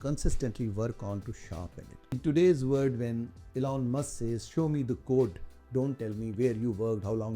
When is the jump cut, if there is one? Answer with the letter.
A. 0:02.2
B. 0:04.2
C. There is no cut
A